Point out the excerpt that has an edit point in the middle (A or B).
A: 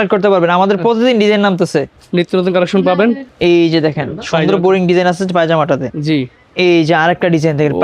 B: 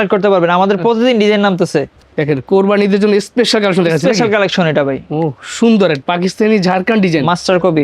B